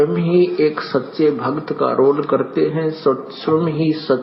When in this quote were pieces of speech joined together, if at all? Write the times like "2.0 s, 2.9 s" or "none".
1.6 s